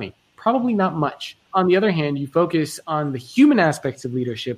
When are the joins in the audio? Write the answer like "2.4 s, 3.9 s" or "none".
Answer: 1.4 s